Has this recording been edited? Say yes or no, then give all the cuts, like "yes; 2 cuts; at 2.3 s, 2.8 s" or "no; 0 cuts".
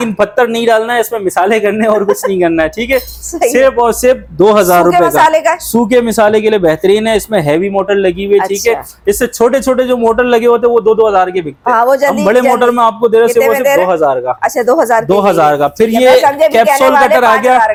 no; 0 cuts